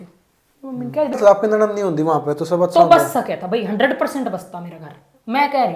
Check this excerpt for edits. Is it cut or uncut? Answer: cut